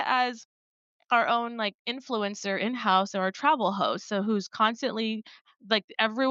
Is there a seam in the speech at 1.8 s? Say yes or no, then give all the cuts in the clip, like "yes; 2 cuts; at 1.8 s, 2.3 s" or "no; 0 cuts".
no; 0 cuts